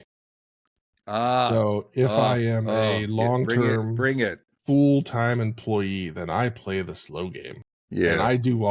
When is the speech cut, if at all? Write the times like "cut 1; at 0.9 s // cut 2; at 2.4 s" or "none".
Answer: none